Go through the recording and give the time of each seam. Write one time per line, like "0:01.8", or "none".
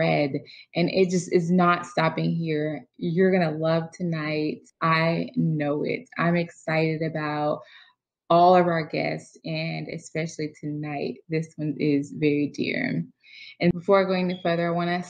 0:13.8